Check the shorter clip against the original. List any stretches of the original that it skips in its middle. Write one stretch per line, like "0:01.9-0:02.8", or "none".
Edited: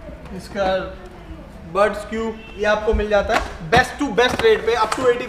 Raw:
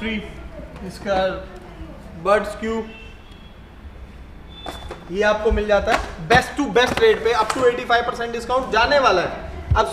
0:03.0-0:05.0